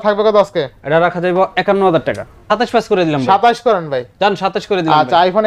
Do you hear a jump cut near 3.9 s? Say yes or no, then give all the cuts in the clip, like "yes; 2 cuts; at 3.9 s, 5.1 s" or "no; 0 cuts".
no; 1 cut; at 2.5 s